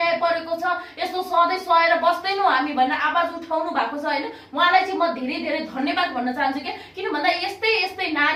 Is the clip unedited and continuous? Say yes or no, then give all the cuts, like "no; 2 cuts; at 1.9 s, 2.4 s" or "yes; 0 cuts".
yes; 0 cuts